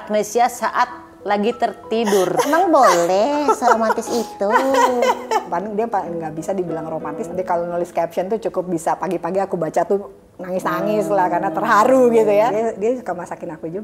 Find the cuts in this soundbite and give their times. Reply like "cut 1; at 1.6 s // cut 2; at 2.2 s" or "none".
cut 1; at 2.5 s // cut 2; at 5.5 s // cut 3; at 7.2 s // cut 4; at 12.5 s